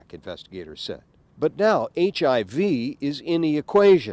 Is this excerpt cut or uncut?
uncut